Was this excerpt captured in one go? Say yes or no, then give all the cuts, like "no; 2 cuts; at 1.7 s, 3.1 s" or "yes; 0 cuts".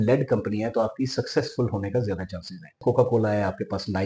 no; 1 cut; at 2.7 s